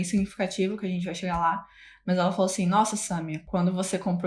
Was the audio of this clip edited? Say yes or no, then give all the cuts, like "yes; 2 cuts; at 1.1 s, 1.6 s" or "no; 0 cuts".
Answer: yes; 1 cut; at 3.4 s